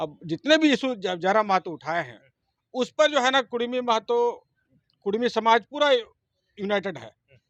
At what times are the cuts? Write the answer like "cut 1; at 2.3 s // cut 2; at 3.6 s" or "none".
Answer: none